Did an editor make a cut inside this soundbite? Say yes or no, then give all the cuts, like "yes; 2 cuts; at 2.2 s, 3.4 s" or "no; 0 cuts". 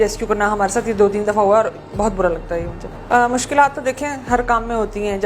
yes; 1 cut; at 2.9 s